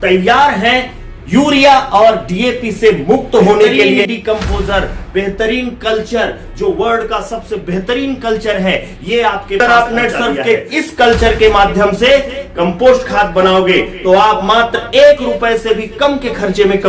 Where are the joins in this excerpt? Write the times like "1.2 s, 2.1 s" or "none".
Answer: 4.0 s, 9.6 s